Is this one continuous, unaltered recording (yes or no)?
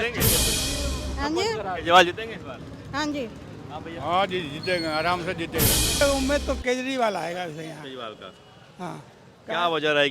no